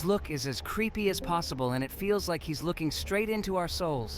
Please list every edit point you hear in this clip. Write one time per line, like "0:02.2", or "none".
none